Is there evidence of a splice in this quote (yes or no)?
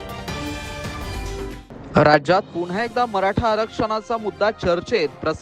yes